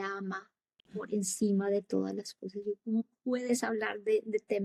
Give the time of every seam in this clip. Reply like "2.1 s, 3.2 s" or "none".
none